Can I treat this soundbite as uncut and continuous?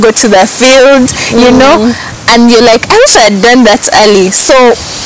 yes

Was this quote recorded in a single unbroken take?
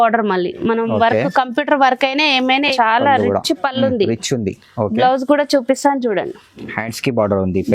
no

